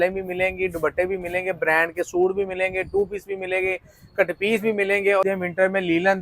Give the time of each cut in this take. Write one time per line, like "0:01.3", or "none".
0:05.3